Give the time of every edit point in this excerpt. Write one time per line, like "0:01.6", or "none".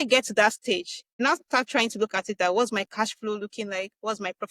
0:01.2

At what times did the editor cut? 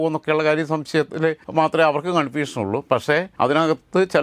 0:01.4
0:03.3

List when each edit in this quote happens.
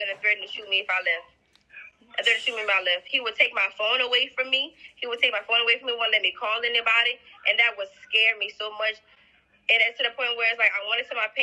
none

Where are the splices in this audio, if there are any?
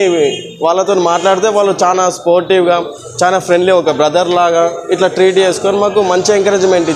none

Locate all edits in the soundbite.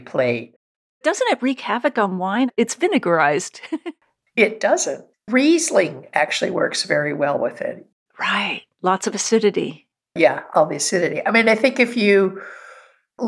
0:01.0
0:02.5
0:03.6
0:05.0

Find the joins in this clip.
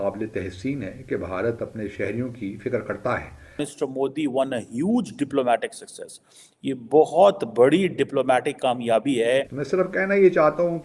0:03.7
0:09.6

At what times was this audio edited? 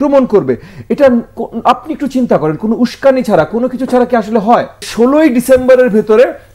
0:04.9

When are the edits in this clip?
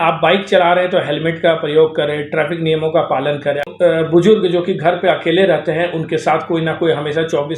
0:03.6

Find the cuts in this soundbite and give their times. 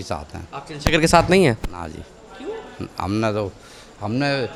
none

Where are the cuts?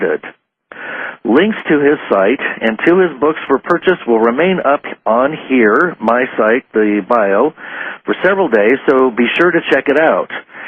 none

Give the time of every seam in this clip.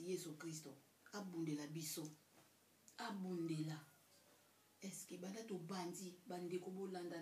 none

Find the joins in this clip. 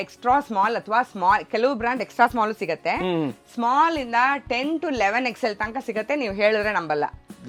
none

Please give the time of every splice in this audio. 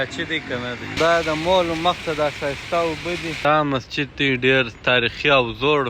0:01.2
0:03.5

